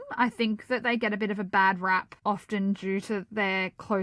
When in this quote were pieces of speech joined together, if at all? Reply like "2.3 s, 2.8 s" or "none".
2.1 s